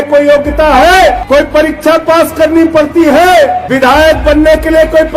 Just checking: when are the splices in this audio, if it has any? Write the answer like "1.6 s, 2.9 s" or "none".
1.2 s, 3.6 s